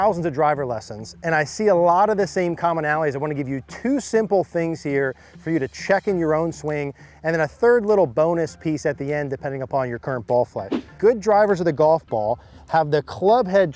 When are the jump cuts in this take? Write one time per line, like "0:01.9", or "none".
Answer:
0:10.9